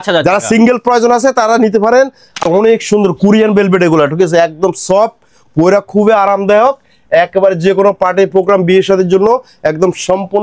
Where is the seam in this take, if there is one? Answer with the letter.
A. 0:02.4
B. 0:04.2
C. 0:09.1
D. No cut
A